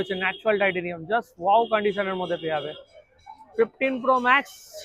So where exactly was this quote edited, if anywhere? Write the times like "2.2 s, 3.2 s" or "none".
none